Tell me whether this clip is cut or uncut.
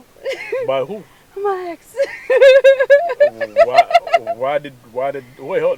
uncut